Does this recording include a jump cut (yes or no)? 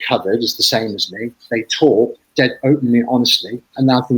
no